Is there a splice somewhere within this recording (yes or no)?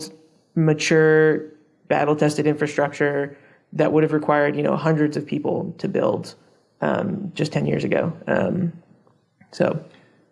no